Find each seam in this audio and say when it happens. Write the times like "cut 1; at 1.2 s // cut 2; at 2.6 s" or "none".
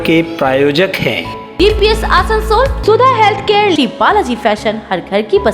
cut 1; at 1.4 s